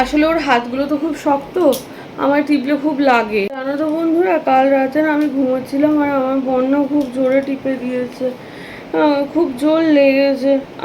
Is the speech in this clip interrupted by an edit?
yes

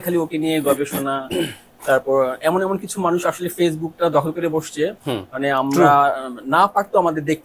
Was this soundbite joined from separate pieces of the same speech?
no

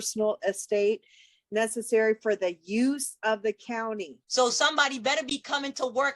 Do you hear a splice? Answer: yes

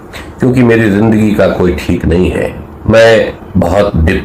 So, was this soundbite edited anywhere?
yes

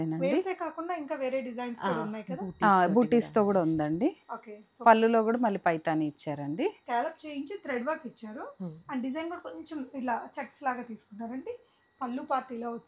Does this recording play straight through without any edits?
no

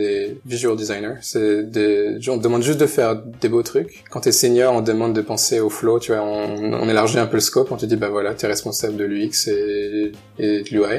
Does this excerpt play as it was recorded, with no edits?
yes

